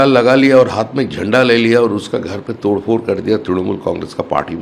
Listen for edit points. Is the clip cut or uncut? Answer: uncut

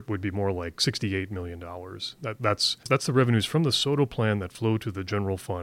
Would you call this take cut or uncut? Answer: cut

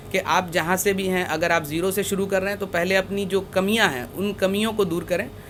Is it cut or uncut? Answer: uncut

